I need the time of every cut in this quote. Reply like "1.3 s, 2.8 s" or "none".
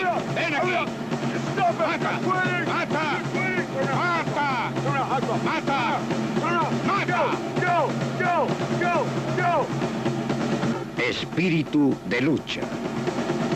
none